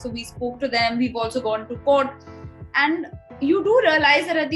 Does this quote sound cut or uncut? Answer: uncut